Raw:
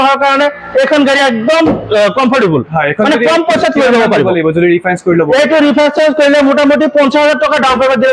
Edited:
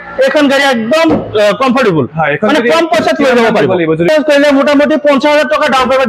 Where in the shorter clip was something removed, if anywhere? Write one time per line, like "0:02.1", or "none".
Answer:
0:04.1